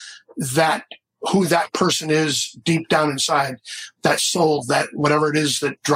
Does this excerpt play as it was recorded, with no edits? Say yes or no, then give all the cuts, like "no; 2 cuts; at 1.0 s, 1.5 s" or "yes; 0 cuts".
yes; 0 cuts